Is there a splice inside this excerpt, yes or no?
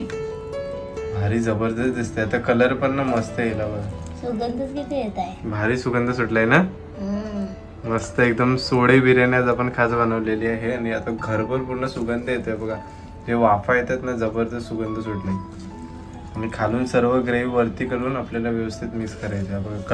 no